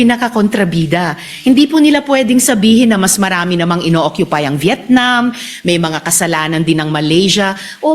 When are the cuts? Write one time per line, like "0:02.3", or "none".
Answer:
none